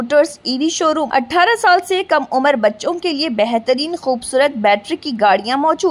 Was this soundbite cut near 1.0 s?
yes; 1 cut; at 1.0 s

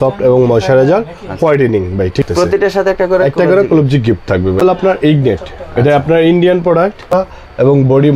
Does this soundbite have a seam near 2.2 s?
yes; 3 cuts; at 2.2 s, 4.6 s, 7.1 s

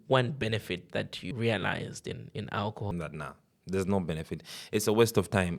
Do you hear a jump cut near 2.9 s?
yes; 2 cuts; at 1.2 s, 2.9 s

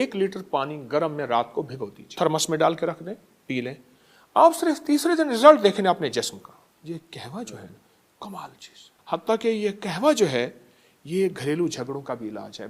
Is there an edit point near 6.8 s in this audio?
yes; 3 cuts; at 2.1 s, 6.8 s, 9.0 s

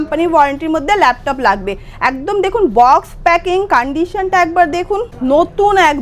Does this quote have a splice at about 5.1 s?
yes; 1 cut; at 5.1 s

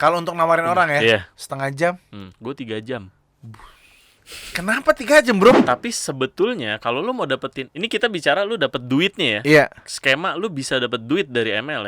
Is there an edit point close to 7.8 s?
no; 1 cut; at 5.6 s

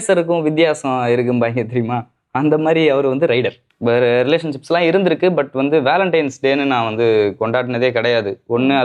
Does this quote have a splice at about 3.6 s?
yes; 1 cut; at 3.6 s

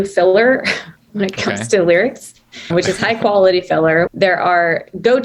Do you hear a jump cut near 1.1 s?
no; 2 cuts; at 2.7 s, 4.1 s

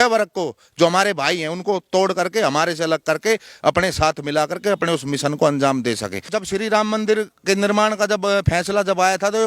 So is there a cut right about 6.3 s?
yes; 1 cut; at 6.3 s

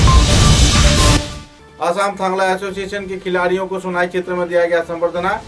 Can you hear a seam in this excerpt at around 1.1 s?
yes; 1 cut; at 1.1 s

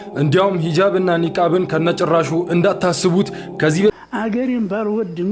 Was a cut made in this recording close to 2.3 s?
no; 1 cut; at 3.9 s

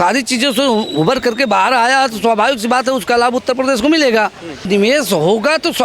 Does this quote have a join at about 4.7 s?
yes; 1 cut; at 4.7 s

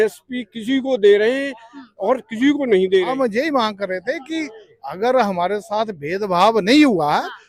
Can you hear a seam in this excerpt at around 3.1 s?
yes; 1 cut; at 3.1 s

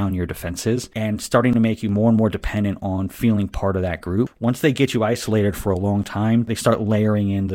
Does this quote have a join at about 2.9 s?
no; 3 cuts; at 0.9 s, 4.3 s, 6.5 s

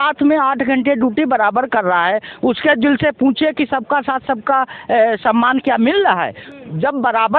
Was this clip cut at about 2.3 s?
no; 0 cuts

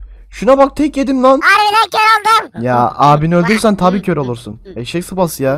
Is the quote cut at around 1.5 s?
yes; 1 cut; at 1.5 s

